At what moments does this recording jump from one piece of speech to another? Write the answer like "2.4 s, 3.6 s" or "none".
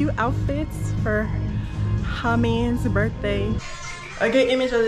3.7 s